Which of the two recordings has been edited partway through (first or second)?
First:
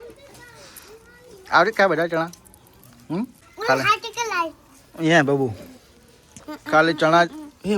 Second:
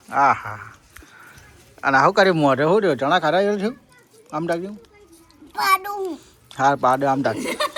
first